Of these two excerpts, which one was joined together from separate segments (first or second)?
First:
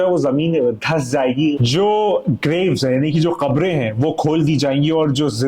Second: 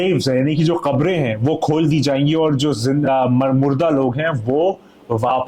first